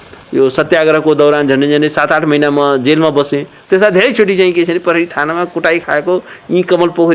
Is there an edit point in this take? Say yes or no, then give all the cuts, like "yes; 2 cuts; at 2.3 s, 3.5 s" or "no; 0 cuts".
no; 0 cuts